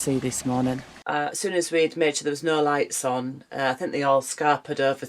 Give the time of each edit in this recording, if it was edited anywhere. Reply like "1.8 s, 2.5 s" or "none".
1.0 s